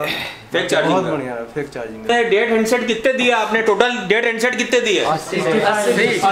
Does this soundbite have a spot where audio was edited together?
yes; 1 cut; at 2.1 s

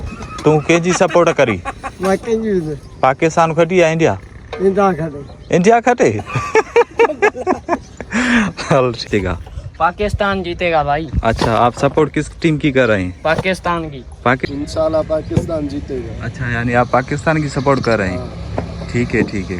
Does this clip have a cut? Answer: yes; 2 cuts; at 9.0 s, 14.4 s

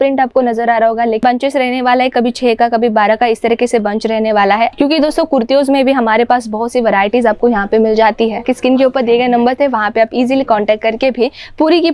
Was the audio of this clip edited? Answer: yes; 3 cuts; at 1.2 s, 4.7 s, 8.4 s

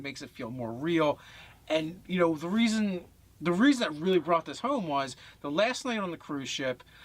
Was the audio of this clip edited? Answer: no; 0 cuts

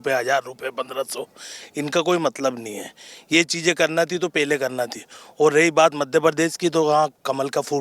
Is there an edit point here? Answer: no; 0 cuts

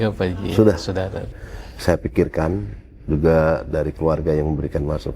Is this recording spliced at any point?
yes; 1 cut; at 1.2 s

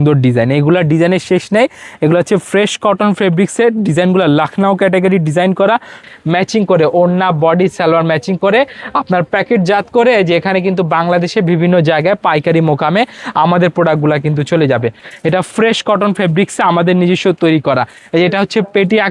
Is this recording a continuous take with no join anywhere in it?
no; 2 cuts; at 6.0 s, 15.0 s

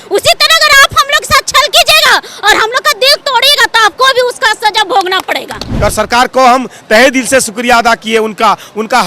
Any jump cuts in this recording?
yes; 1 cut; at 5.7 s

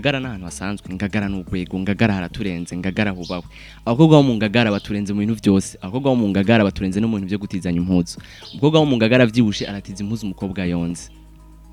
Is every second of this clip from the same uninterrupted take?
yes; 0 cuts

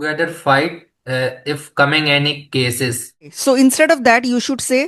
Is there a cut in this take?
yes; 1 cut; at 3.3 s

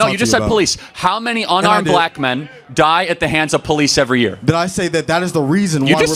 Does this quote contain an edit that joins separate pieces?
no; 0 cuts

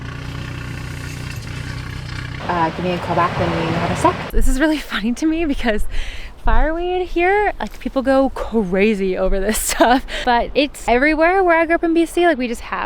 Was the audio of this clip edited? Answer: yes; 3 cuts; at 2.3 s, 4.3 s, 10.5 s

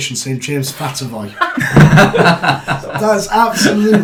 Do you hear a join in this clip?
no; 0 cuts

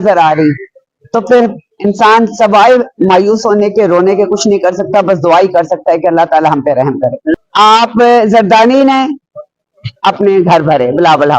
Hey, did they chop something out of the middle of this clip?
yes; 1 cut; at 7.3 s

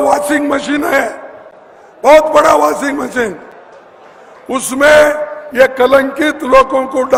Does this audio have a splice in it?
no; 0 cuts

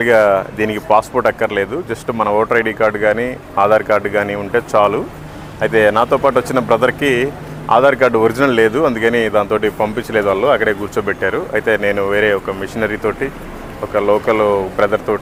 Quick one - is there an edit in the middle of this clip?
no; 0 cuts

